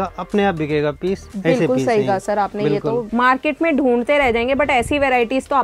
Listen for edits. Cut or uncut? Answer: cut